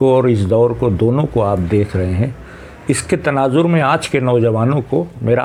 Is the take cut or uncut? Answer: uncut